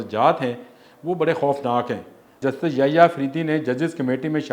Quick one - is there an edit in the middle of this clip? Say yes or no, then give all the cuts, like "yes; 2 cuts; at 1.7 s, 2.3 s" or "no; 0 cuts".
yes; 1 cut; at 2.4 s